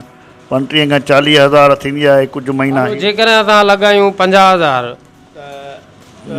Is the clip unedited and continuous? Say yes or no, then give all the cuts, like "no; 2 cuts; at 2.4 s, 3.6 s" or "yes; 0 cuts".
yes; 0 cuts